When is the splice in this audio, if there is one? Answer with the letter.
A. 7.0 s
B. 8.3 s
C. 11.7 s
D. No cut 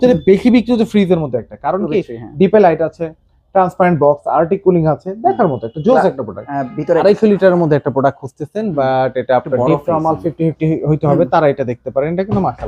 A